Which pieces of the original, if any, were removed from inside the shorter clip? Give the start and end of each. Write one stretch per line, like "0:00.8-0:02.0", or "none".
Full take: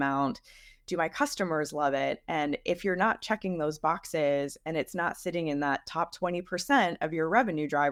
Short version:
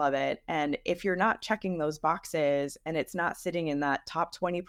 none